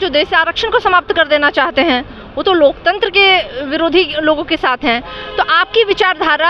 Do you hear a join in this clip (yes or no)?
no